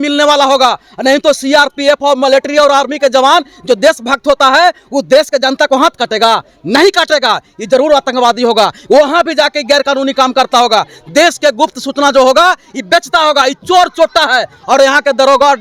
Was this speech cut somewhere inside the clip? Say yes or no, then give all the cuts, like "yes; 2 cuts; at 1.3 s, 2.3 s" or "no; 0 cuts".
no; 0 cuts